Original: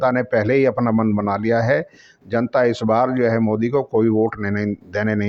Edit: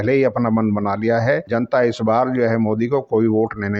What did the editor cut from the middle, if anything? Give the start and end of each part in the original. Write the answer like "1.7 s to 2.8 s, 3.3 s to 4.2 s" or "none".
1.9 s to 2.3 s

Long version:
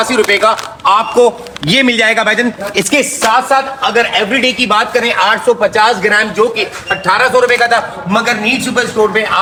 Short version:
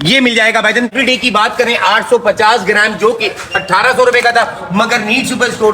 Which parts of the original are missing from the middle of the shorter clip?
2.6 s to 4.3 s

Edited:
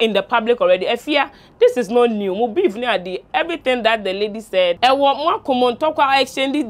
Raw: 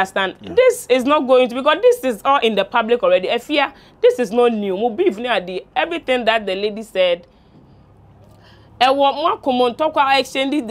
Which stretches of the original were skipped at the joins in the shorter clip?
7.2 s to 8.8 s

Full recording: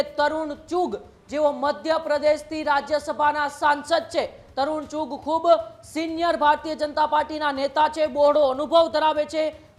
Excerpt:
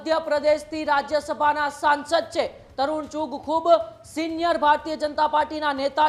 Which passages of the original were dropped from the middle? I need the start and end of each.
none

